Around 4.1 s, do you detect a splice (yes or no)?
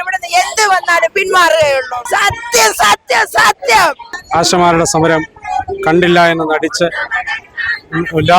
yes